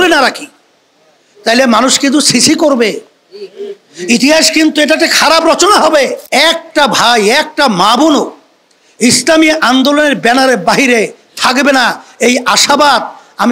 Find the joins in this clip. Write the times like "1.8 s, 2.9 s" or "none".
6.2 s